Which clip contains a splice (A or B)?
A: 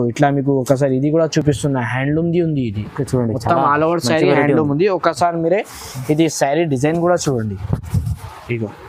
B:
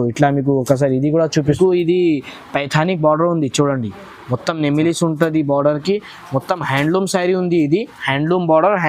B